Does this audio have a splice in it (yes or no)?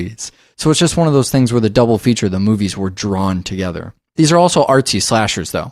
yes